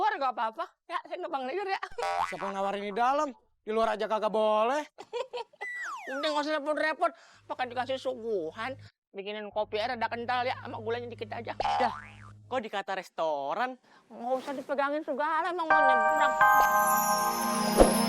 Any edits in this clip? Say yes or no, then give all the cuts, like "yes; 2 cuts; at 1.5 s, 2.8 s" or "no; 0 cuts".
yes; 1 cut; at 15.7 s